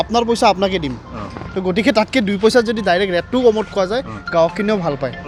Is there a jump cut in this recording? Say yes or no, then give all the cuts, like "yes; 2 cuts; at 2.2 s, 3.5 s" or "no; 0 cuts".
no; 0 cuts